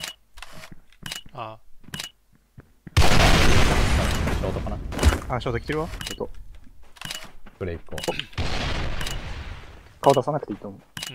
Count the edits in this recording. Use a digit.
1